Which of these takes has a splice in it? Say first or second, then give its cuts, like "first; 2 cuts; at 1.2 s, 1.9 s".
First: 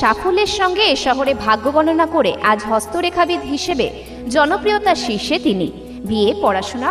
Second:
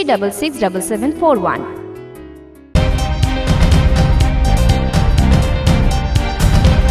second; 1 cut; at 2.7 s